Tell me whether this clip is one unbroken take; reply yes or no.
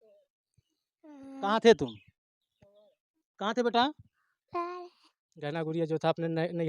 no